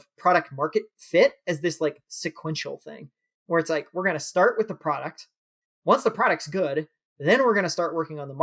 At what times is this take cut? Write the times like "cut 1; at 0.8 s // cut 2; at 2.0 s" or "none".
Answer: none

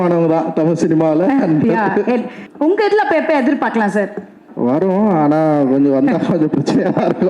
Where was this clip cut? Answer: cut 1; at 2.4 s // cut 2; at 4.5 s

